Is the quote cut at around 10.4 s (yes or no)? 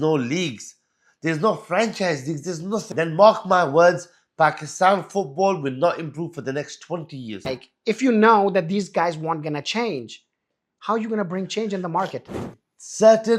no